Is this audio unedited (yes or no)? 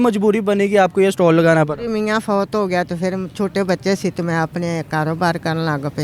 yes